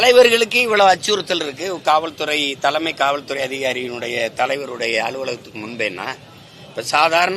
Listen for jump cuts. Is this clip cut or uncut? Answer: uncut